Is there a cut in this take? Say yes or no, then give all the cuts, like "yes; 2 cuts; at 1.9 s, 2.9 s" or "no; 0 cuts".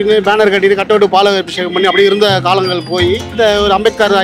yes; 1 cut; at 3.3 s